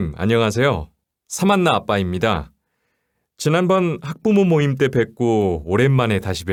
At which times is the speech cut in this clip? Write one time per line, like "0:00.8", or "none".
none